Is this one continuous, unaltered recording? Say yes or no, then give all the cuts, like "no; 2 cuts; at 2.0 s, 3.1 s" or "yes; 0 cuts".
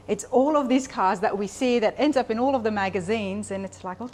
yes; 0 cuts